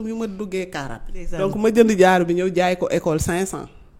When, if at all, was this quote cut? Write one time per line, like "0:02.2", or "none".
0:01.4